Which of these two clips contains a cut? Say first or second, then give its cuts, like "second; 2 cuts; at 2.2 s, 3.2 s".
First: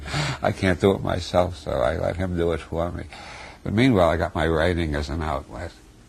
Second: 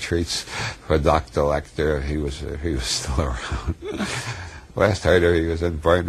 first; 1 cut; at 1.8 s